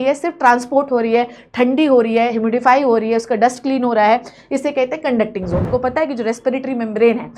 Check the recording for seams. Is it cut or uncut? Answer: cut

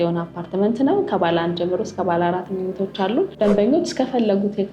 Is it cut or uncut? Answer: cut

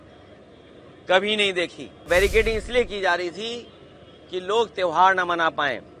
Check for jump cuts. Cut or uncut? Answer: cut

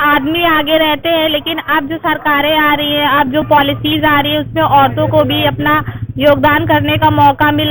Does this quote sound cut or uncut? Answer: uncut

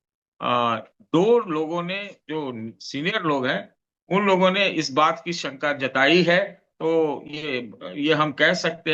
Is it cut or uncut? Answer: uncut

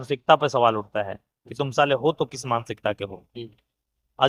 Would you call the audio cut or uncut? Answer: uncut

